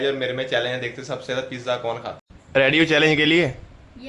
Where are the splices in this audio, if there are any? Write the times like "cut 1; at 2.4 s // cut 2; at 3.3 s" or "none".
cut 1; at 2.2 s

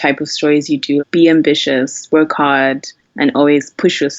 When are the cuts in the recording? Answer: cut 1; at 1.0 s

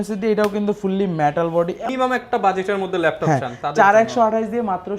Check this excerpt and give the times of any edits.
cut 1; at 1.9 s

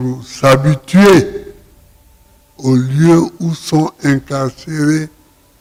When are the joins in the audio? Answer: none

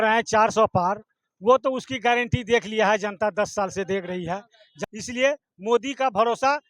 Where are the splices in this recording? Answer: cut 1; at 4.6 s

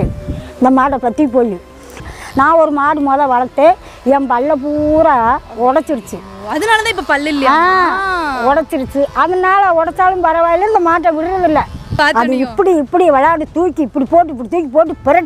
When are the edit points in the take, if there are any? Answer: cut 1; at 2.1 s // cut 2; at 11.9 s

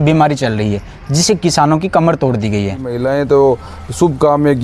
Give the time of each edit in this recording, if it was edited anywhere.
cut 1; at 3.0 s

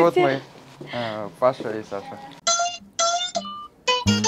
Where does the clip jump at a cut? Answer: cut 1; at 2.3 s

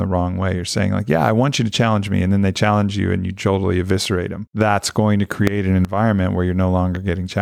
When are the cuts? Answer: cut 1; at 4.4 s

